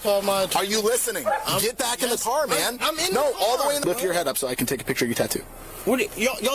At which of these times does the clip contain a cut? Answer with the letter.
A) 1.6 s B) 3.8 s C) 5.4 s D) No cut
B